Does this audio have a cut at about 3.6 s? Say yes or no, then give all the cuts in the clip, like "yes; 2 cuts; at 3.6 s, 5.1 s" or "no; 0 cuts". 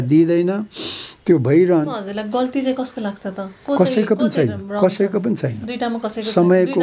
no; 1 cut; at 2.0 s